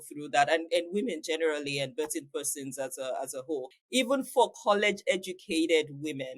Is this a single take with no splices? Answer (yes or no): no